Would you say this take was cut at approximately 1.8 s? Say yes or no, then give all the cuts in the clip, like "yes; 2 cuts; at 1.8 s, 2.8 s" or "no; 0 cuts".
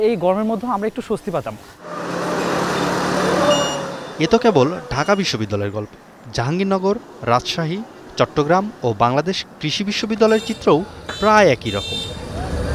no; 0 cuts